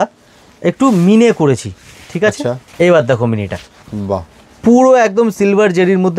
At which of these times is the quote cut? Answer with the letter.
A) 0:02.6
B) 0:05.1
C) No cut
A